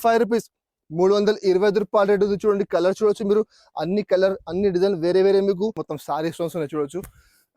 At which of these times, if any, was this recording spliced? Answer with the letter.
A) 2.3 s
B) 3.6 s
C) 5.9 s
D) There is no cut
C